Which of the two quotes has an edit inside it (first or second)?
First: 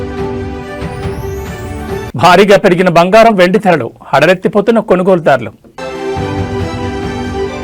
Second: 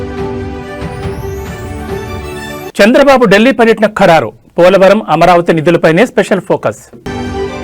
second